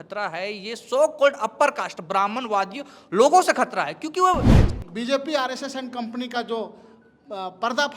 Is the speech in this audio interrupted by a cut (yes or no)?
yes